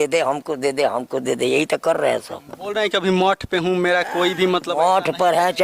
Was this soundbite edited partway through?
no; 0 cuts

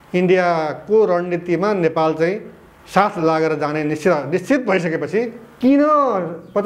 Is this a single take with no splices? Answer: no; 1 cut; at 5.4 s

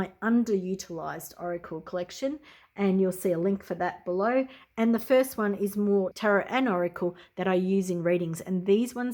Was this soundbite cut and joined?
yes; 1 cut; at 6.1 s

